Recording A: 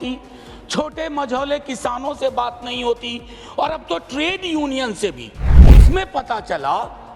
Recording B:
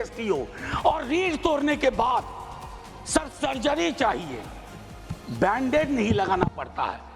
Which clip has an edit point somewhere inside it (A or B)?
A